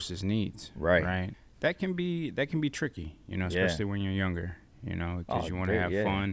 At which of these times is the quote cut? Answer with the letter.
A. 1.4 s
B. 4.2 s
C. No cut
A